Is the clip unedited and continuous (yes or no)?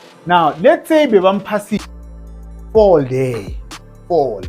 no